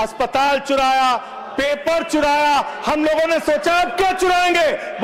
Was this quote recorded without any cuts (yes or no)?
yes